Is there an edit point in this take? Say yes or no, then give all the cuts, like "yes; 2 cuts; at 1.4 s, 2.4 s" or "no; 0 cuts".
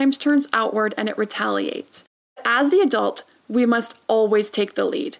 yes; 1 cut; at 2.5 s